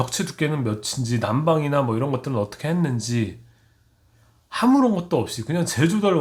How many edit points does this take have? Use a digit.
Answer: 0